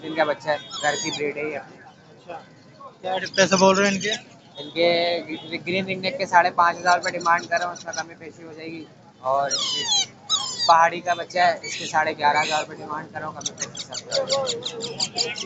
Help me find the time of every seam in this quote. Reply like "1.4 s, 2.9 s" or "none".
none